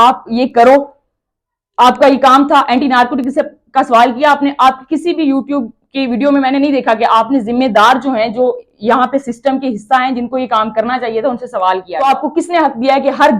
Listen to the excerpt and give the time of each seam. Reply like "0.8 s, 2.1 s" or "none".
11.9 s

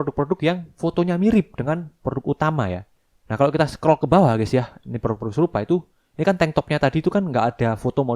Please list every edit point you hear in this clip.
2.8 s

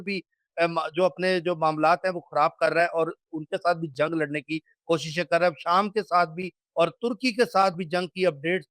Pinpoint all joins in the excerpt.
none

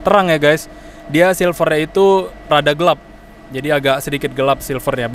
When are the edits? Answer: 2.4 s

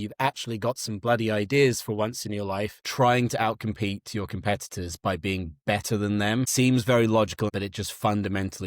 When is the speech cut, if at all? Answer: 2.8 s, 6.5 s, 7.5 s

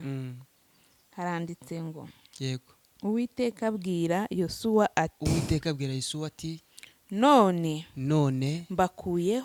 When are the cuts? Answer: none

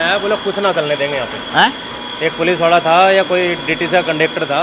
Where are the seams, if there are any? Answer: none

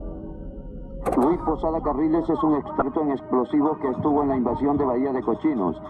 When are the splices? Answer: 2.7 s

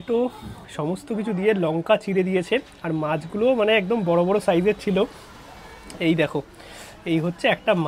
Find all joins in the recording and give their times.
none

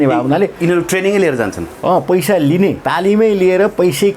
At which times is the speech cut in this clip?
2.8 s

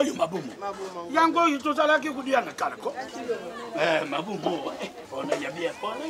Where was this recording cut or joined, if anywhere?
5.0 s

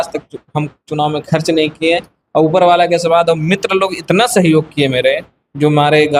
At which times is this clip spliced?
none

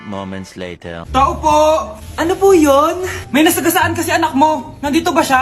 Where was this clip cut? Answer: 1.0 s

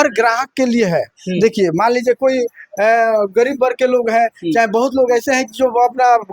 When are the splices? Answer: none

